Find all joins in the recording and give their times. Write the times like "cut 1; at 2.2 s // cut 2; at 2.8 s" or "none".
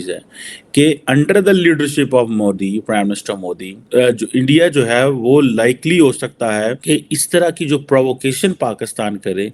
cut 1; at 3.7 s // cut 2; at 6.8 s